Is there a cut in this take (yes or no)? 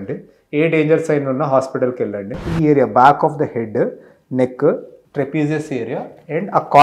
yes